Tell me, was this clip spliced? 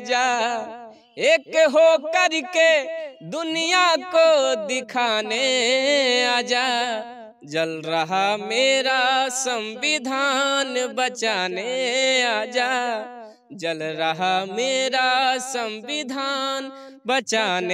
no; 0 cuts

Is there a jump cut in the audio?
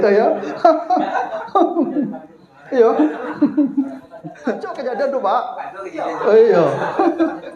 yes; 1 cut; at 4.7 s

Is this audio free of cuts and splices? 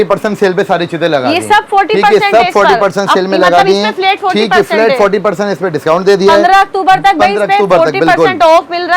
yes; 0 cuts

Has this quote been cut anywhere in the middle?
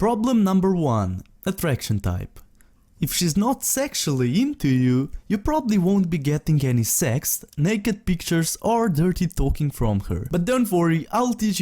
yes; 1 cut; at 10.7 s

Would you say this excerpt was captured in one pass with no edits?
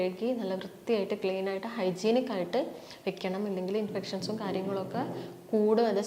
yes; 0 cuts

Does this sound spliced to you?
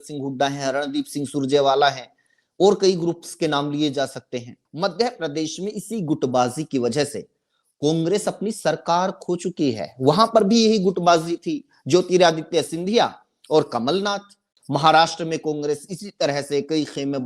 yes; 2 cuts; at 4.6 s, 14.5 s

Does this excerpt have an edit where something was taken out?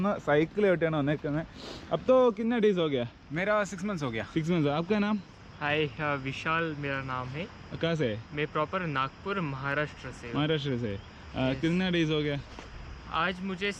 no; 0 cuts

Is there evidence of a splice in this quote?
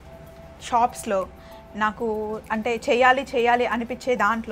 no; 0 cuts

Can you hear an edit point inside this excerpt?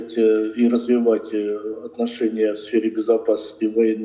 no; 0 cuts

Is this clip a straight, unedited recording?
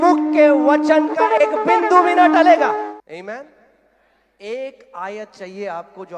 no; 1 cut; at 2.9 s

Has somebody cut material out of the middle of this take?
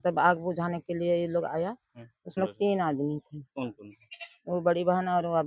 yes; 1 cut; at 2.4 s

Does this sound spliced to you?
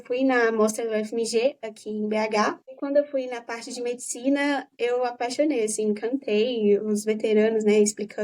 yes; 1 cut; at 2.7 s

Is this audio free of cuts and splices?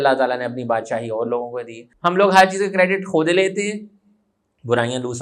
no; 1 cut; at 1.8 s

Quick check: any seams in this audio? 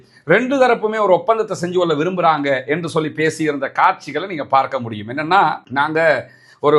no; 0 cuts

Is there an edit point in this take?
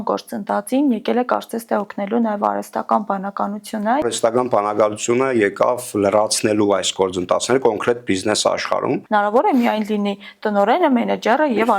yes; 2 cuts; at 4.0 s, 9.0 s

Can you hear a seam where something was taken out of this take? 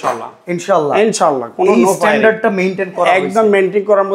no; 0 cuts

